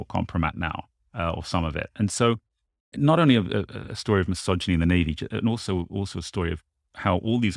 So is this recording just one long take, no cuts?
no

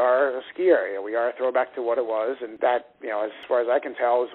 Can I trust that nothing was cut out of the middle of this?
no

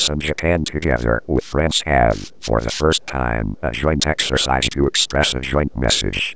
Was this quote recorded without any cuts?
yes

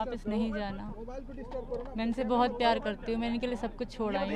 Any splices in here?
no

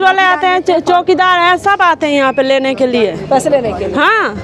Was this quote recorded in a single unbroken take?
yes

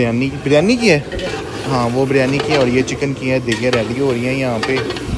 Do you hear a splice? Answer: no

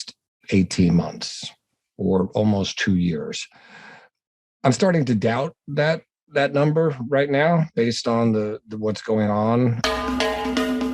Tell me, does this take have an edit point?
yes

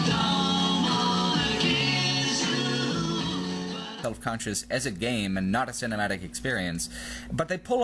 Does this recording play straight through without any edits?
yes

